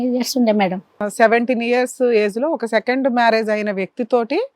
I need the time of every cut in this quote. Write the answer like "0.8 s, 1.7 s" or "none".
1.1 s